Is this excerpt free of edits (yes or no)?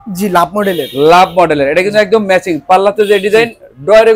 yes